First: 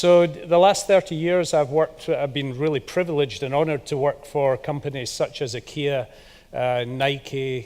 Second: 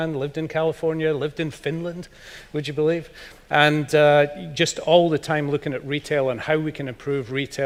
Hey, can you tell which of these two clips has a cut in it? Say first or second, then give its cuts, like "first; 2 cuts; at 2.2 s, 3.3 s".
first; 1 cut; at 3.8 s